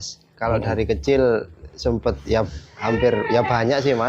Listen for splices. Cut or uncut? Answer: uncut